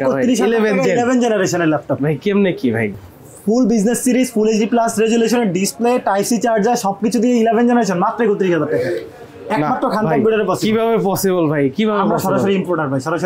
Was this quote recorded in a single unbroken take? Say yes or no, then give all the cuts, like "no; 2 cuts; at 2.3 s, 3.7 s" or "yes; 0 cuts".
yes; 0 cuts